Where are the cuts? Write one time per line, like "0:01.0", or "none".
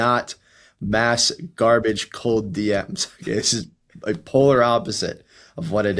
none